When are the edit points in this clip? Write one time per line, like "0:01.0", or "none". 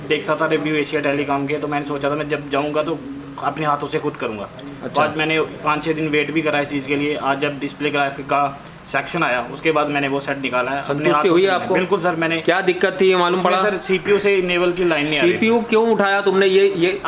none